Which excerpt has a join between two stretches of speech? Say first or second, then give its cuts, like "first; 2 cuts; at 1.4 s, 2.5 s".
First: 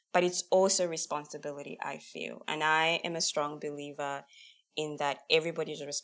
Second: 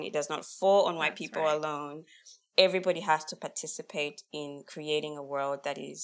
second; 1 cut; at 3.3 s